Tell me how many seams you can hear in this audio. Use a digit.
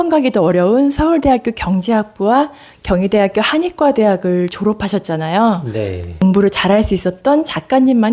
0